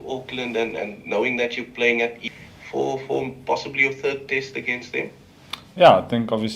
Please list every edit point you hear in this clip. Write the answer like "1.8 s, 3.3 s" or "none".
2.2 s